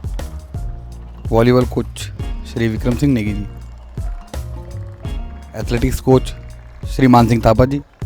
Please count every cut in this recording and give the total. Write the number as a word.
three